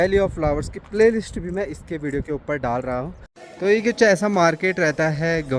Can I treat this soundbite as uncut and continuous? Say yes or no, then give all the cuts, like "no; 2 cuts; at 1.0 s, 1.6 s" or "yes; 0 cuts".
no; 1 cut; at 3.3 s